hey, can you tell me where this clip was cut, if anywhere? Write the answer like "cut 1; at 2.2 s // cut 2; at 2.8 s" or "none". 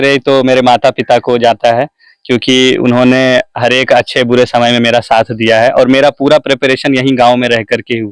none